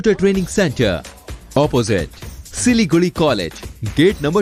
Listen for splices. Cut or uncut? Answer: uncut